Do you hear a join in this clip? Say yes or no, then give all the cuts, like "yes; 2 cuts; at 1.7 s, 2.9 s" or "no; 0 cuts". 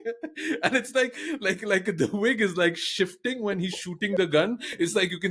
no; 0 cuts